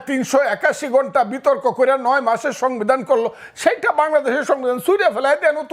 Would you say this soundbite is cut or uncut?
uncut